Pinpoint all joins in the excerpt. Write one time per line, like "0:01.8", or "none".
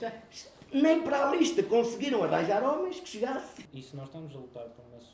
0:03.6